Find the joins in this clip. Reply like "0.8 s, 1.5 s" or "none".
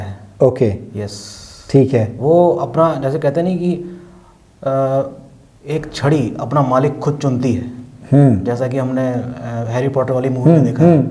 none